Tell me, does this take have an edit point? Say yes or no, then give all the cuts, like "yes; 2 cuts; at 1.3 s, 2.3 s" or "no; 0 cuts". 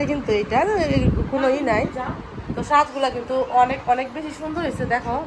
no; 0 cuts